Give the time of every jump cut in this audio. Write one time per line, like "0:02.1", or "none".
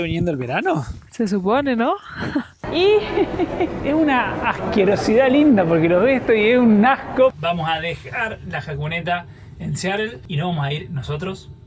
0:02.6
0:07.3
0:10.2